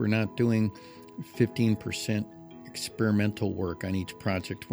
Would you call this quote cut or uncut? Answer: uncut